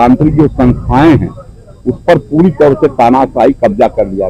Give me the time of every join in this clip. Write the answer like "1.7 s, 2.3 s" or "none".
none

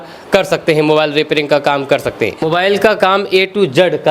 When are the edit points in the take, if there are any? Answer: 2.4 s

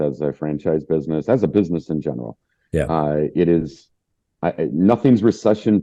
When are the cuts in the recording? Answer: none

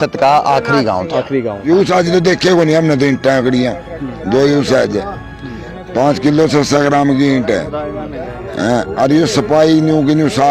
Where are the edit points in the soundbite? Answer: 1.6 s

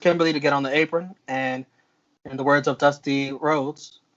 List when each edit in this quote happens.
none

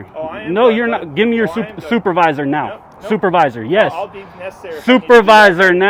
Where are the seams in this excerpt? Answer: none

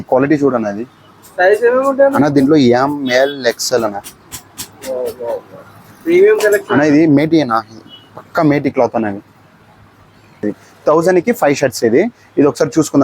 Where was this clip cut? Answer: 10.4 s

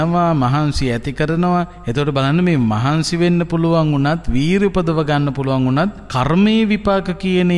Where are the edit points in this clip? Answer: 1.8 s, 6.0 s

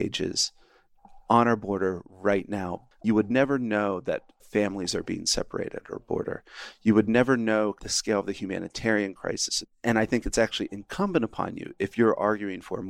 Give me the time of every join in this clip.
2.8 s, 7.9 s, 9.7 s

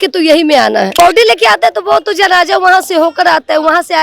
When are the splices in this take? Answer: 0.9 s

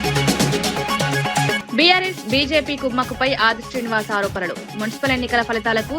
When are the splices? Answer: 1.6 s

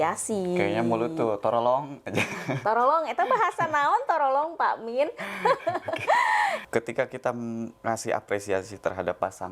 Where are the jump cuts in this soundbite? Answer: 6.6 s

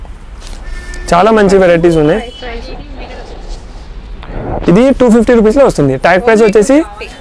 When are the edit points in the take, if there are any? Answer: none

